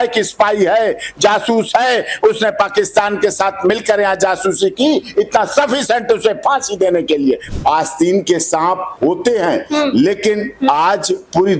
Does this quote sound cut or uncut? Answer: cut